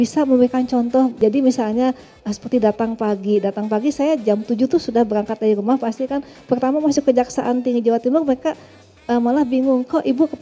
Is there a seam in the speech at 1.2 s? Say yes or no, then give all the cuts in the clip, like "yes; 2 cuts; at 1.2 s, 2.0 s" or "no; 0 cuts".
yes; 1 cut; at 1.2 s